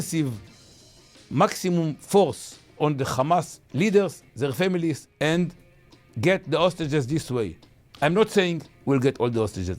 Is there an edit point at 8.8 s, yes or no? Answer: no